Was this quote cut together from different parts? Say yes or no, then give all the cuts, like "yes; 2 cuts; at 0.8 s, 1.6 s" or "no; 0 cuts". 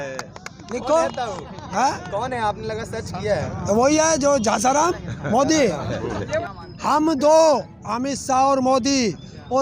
yes; 1 cut; at 6.4 s